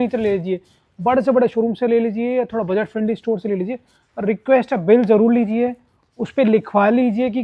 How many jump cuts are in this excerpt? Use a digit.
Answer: 0